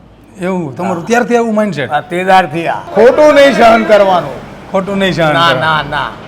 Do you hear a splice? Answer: no; 0 cuts

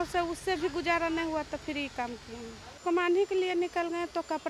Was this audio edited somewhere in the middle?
yes; 1 cut; at 2.8 s

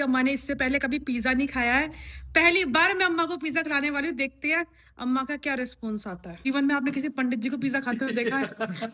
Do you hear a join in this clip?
yes; 1 cut; at 6.4 s

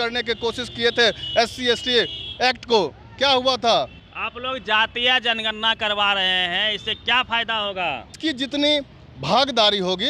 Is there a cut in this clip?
yes; 2 cuts; at 4.0 s, 8.2 s

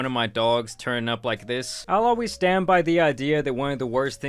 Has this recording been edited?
yes; 1 cut; at 1.7 s

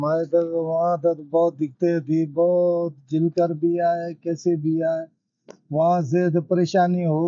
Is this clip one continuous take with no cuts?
yes; 0 cuts

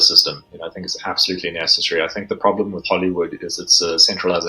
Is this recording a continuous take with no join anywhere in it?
yes; 0 cuts

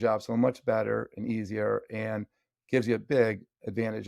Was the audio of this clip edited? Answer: no; 0 cuts

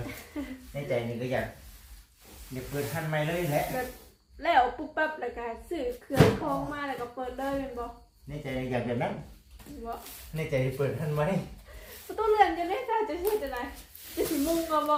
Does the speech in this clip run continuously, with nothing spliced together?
yes; 0 cuts

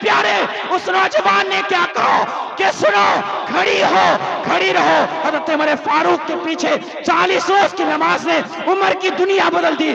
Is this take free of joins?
yes; 0 cuts

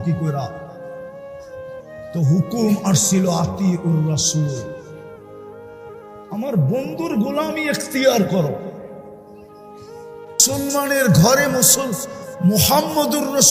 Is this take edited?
no; 0 cuts

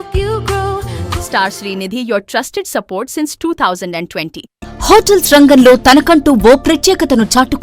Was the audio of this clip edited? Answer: yes; 2 cuts; at 1.0 s, 4.5 s

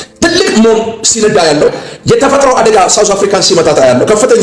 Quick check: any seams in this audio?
yes; 1 cut; at 1.7 s

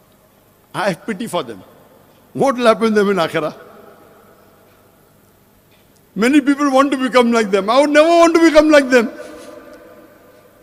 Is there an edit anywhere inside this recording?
no; 0 cuts

